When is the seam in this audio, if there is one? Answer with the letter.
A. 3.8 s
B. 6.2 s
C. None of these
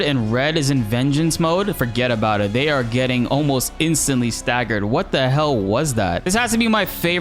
B